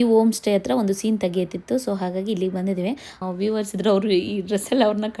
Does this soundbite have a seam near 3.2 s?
yes; 1 cut; at 3.2 s

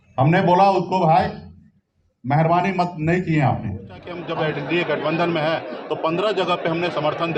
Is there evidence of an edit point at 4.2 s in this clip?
yes; 1 cut; at 4.2 s

